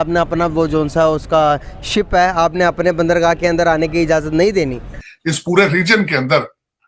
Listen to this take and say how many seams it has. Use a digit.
1